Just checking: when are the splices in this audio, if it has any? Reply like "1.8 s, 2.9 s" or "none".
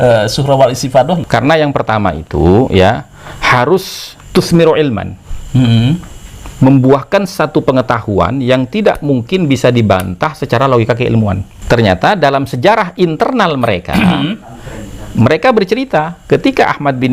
1.2 s, 11.5 s